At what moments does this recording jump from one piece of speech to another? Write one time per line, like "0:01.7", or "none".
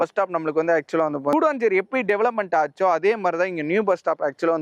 0:01.3